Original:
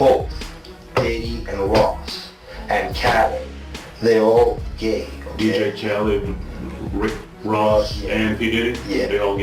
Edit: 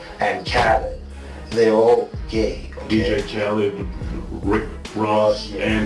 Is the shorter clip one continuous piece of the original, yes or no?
yes